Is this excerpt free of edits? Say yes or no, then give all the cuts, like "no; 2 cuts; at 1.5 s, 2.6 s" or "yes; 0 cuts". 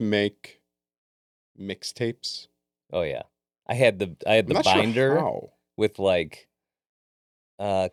yes; 0 cuts